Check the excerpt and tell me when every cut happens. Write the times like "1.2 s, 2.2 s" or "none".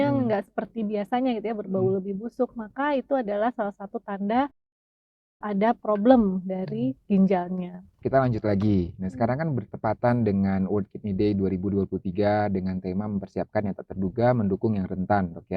8.0 s